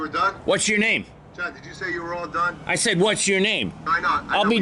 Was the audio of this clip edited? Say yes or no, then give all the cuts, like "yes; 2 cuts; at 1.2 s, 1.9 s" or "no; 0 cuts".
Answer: no; 0 cuts